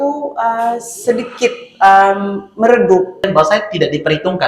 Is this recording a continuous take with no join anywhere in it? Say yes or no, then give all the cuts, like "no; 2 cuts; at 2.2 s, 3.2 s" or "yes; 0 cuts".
no; 1 cut; at 3.2 s